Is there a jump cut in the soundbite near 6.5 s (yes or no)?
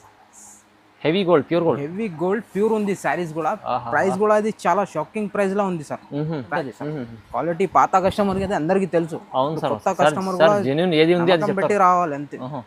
yes